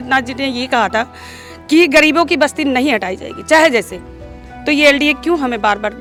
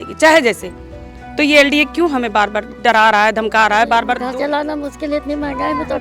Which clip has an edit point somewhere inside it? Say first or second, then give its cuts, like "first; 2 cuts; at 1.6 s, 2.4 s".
second; 1 cut; at 4.2 s